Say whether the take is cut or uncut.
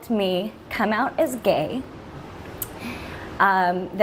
uncut